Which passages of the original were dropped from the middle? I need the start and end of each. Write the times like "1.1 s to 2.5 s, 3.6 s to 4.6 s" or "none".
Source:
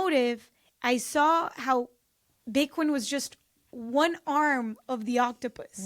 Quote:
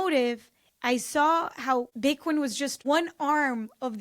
1.9 s to 2.4 s, 3.3 s to 3.8 s